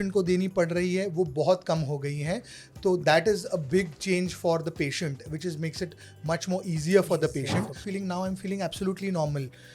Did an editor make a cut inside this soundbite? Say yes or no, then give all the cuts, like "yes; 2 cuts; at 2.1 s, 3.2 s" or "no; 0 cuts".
yes; 1 cut; at 7.8 s